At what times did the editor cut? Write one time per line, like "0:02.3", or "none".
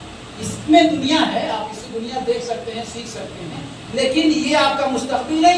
none